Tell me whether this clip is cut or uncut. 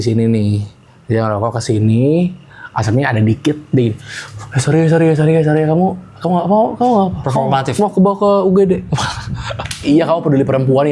cut